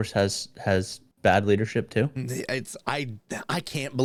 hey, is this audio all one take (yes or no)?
yes